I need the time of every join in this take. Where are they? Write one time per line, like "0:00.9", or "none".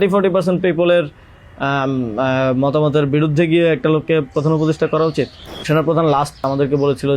0:05.7
0:06.4